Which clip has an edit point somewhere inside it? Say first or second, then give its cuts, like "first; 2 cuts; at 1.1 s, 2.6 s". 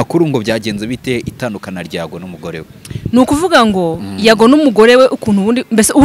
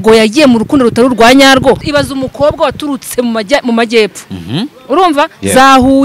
second; 1 cut; at 1.8 s